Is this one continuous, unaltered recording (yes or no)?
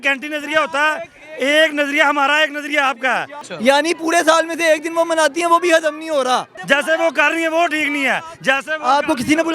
no